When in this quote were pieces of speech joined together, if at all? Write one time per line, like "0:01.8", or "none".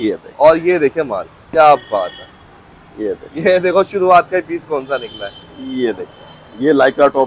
none